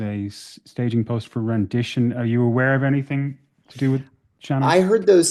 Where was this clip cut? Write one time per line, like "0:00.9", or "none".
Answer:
none